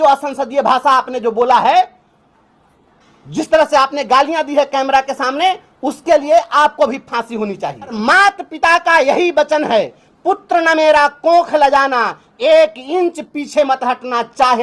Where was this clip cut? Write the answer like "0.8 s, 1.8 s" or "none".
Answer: 8.0 s